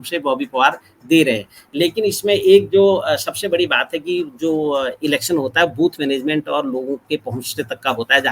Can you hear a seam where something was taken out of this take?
no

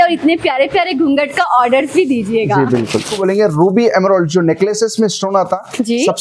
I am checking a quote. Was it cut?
yes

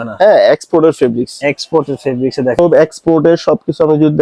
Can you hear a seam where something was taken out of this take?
yes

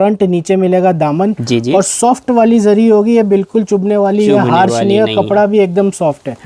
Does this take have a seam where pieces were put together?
no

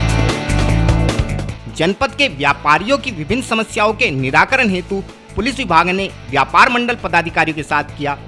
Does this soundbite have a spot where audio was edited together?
yes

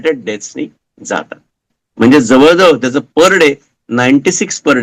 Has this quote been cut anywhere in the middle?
no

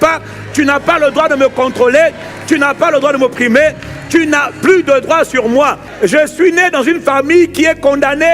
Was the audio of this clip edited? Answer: yes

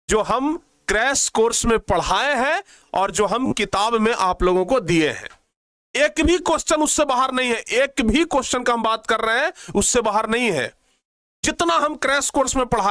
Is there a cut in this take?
no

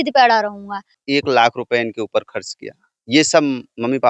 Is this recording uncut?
no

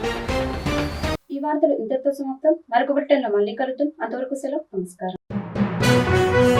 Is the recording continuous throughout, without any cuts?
yes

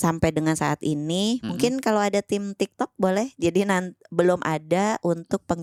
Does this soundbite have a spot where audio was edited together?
no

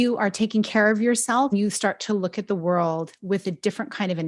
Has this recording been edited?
yes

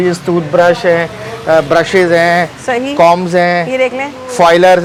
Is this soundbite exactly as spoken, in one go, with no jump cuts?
yes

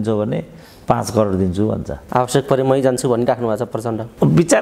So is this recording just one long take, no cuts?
no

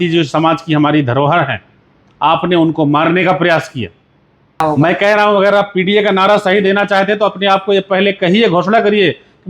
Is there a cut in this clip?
yes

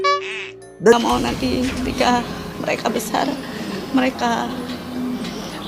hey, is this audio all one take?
no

